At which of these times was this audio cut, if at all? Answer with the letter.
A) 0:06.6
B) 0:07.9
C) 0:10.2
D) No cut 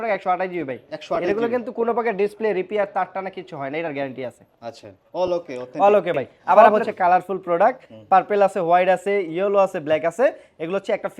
A